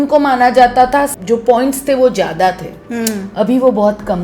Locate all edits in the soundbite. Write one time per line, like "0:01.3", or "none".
0:01.1